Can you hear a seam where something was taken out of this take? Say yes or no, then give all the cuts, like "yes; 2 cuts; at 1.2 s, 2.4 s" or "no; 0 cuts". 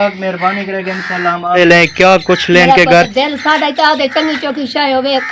yes; 1 cut; at 1.6 s